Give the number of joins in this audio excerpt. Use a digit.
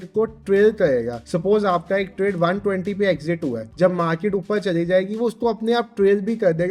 2